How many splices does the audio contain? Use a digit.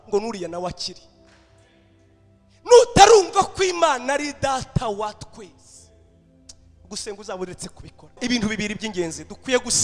1